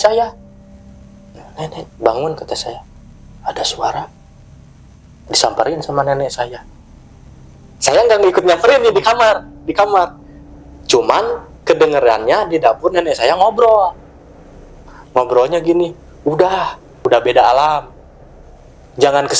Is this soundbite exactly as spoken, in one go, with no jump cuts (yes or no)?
yes